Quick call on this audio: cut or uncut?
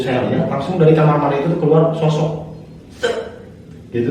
uncut